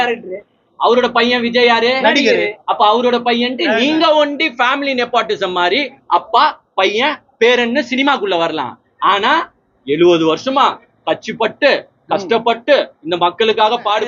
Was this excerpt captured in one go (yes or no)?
yes